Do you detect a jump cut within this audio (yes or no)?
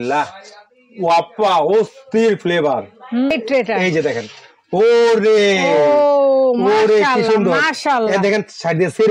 yes